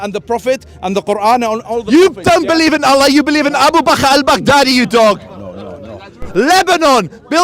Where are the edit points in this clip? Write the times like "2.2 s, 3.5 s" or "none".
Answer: 6.3 s